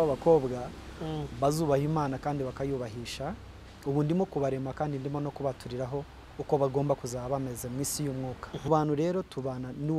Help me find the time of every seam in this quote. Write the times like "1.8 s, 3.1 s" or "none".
8.7 s